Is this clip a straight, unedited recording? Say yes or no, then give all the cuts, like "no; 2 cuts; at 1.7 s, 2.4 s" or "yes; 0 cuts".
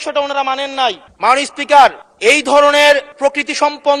no; 3 cuts; at 1.1 s, 2.1 s, 3.1 s